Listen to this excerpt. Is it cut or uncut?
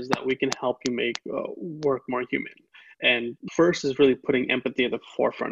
cut